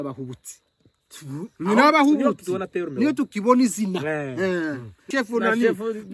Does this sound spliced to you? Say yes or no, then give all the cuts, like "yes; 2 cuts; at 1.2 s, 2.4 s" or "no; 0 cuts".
yes; 1 cut; at 5.1 s